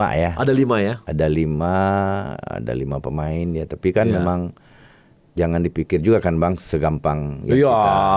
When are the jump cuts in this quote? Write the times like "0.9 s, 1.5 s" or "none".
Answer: none